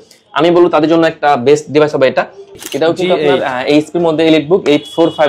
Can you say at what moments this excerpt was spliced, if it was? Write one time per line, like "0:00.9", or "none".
0:02.6